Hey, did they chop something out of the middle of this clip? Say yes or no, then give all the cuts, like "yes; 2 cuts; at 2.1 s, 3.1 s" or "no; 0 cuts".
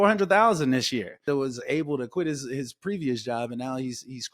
yes; 1 cut; at 1.2 s